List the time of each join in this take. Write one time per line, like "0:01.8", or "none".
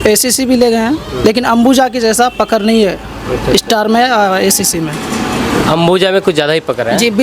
none